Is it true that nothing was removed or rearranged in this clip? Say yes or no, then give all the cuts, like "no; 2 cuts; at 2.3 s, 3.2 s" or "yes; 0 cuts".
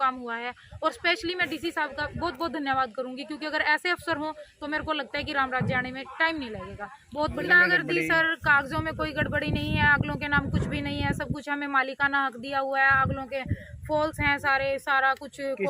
no; 1 cut; at 7.4 s